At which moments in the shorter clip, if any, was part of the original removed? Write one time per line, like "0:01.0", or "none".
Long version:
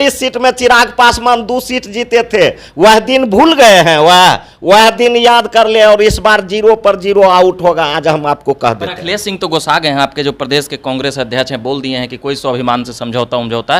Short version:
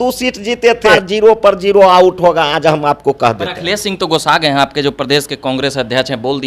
0:01.0